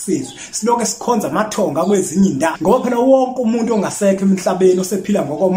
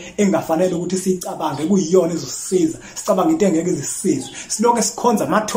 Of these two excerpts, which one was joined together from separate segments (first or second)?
first